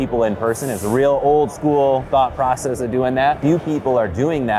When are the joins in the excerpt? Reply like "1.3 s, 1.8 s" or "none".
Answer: 3.4 s